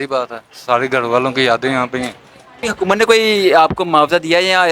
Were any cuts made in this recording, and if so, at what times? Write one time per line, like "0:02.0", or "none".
0:02.6